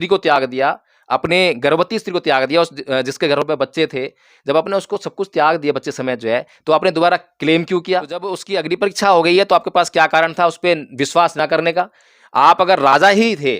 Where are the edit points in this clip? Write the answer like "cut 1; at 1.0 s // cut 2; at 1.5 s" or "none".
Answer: cut 1; at 8.5 s